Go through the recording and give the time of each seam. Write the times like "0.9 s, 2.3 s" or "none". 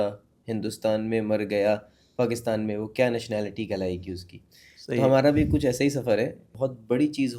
6.5 s